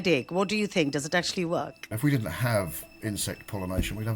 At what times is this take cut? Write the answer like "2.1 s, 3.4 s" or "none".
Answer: 1.8 s